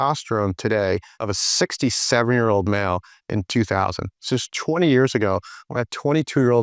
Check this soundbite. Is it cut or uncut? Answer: cut